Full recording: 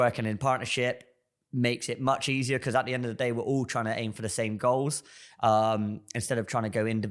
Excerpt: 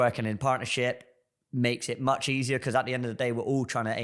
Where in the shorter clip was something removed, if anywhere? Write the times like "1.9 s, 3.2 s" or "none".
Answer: none

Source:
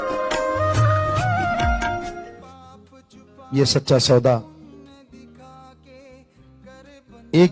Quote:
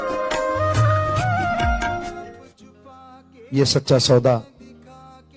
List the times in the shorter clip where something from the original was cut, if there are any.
4.4 s

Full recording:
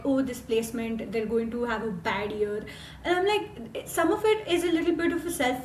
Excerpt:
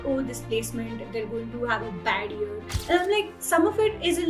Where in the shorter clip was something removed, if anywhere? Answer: 2.7 s, 3.4 s

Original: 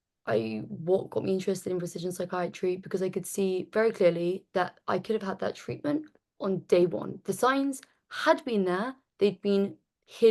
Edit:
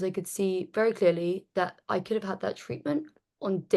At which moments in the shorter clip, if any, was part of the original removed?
none

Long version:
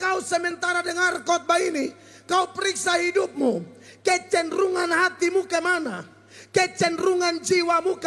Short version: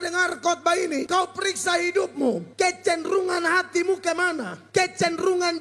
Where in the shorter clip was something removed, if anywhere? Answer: 1.1 s, 2.5 s, 4.5 s

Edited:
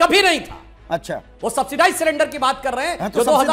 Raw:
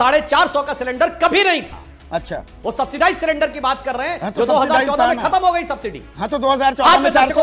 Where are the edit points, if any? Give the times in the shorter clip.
none

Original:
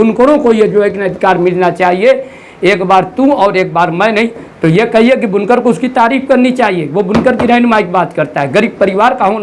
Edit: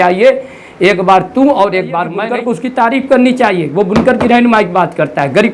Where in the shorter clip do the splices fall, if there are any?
2.2 s

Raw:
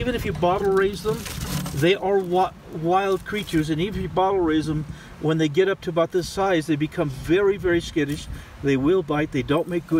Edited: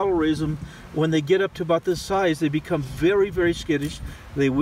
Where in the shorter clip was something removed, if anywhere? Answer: none

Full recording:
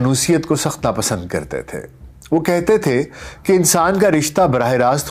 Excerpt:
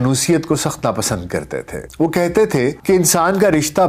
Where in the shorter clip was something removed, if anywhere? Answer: 1.8 s, 2.8 s

